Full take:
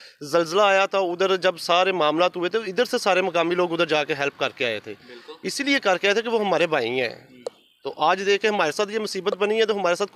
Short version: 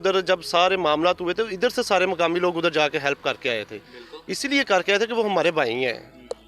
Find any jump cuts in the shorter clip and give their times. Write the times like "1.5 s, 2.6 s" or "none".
none